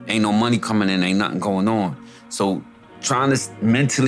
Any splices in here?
no; 0 cuts

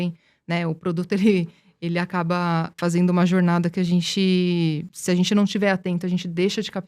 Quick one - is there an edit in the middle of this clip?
yes; 2 cuts; at 2.8 s, 4.9 s

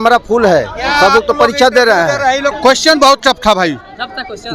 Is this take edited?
yes; 1 cut; at 2.5 s

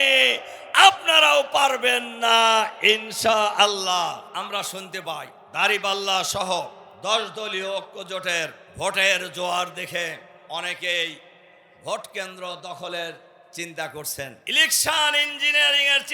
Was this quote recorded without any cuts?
no; 6 cuts; at 4.3 s, 5.4 s, 6.8 s, 8.6 s, 10.3 s, 14.4 s

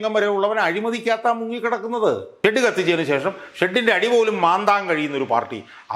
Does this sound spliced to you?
yes; 1 cut; at 2.3 s

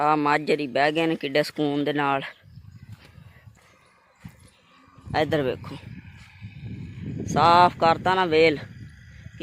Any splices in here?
yes; 1 cut; at 3.6 s

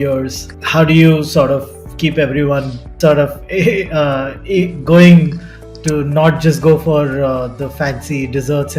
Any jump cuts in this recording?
no; 0 cuts

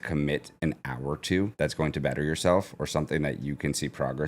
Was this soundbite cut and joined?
yes; 1 cut; at 1.5 s

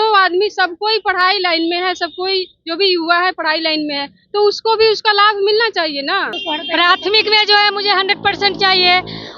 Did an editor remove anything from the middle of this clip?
yes; 1 cut; at 6.4 s

